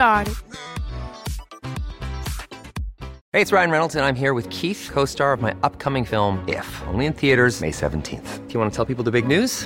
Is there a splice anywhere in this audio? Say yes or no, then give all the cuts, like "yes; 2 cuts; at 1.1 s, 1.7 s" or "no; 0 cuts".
yes; 1 cut; at 3.2 s